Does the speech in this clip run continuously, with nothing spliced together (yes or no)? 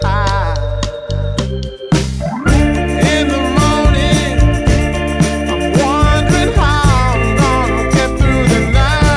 yes